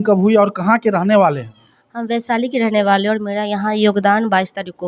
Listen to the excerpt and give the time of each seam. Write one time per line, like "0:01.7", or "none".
none